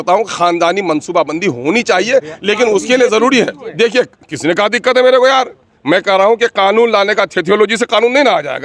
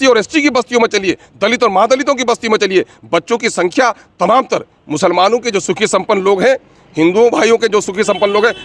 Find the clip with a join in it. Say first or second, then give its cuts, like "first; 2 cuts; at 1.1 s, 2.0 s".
first; 1 cut; at 3.6 s